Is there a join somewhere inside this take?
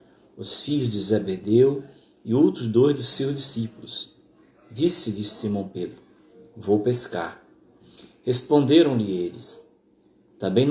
yes; 1 cut; at 9.0 s

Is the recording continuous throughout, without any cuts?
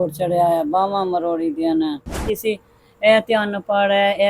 no; 1 cut; at 2.3 s

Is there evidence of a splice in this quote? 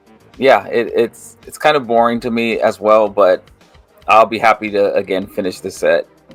no; 0 cuts

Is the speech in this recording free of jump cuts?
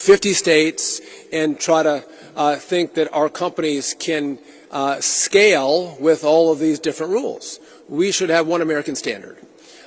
yes; 0 cuts

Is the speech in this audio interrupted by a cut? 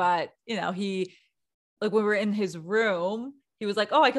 no; 0 cuts

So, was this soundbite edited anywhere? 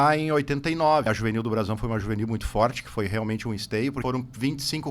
yes; 2 cuts; at 1.1 s, 4.0 s

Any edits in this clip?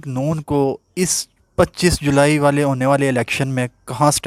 no; 0 cuts

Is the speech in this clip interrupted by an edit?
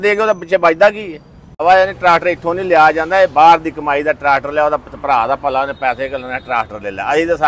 yes; 1 cut; at 1.6 s

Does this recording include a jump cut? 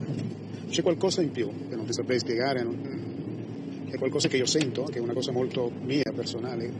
no; 0 cuts

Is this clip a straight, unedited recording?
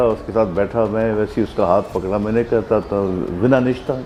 yes; 0 cuts

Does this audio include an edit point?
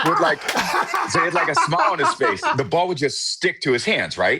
yes; 1 cut; at 2.5 s

